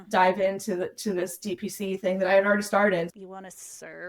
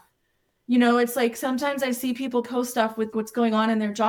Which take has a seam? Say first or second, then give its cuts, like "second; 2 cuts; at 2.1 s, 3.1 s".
first; 1 cut; at 3.1 s